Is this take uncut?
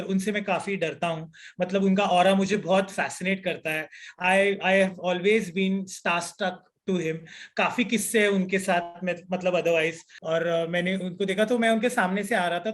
no; 1 cut; at 10.1 s

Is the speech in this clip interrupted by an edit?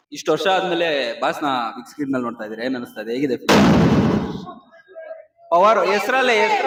no; 0 cuts

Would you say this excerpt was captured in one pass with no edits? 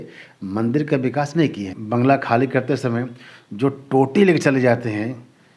no; 1 cut; at 1.7 s

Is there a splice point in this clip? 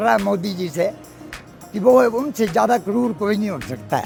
no; 0 cuts

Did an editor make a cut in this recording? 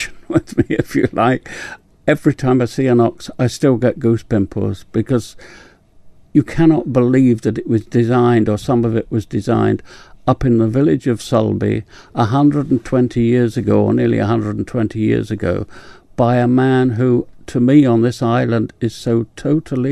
no; 0 cuts

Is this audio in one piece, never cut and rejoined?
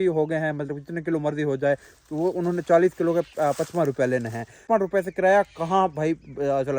no; 1 cut; at 4.5 s

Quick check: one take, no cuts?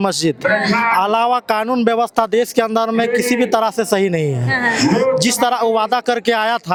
yes; 0 cuts

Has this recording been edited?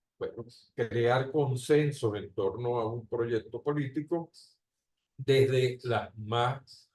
no; 0 cuts

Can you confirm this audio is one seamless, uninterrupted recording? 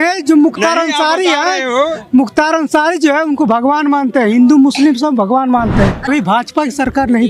no; 1 cut; at 6.1 s

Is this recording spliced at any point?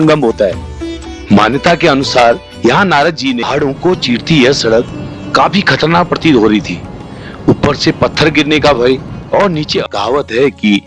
yes; 2 cuts; at 3.4 s, 9.8 s

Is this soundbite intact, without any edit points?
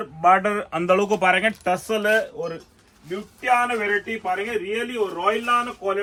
yes; 0 cuts

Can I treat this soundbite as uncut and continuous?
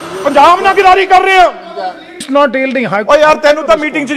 no; 1 cut; at 2.2 s

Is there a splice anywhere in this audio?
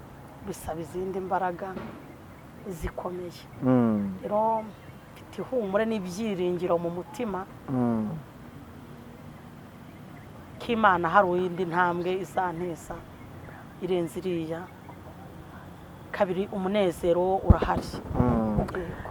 no; 0 cuts

